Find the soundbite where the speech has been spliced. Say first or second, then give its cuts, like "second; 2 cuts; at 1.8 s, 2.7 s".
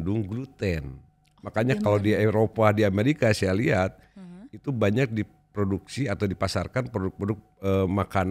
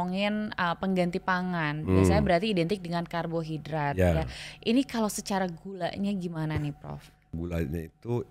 second; 1 cut; at 7.3 s